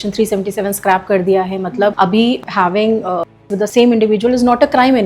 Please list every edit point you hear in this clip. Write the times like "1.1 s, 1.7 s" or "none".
2.2 s, 3.6 s